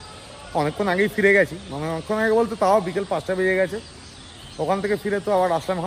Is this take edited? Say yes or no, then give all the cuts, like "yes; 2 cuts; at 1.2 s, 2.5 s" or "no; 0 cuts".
no; 0 cuts